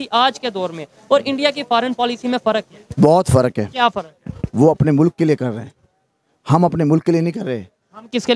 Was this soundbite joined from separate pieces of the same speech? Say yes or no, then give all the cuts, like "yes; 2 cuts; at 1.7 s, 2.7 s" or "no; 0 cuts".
no; 0 cuts